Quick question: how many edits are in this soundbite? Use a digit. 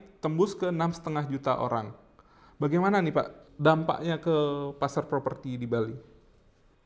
1